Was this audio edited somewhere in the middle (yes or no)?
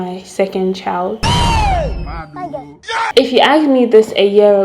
yes